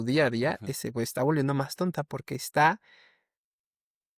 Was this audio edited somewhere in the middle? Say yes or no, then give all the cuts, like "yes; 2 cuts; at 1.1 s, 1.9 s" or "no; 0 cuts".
no; 0 cuts